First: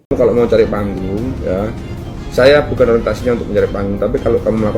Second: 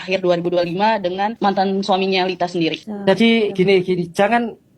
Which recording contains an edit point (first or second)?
second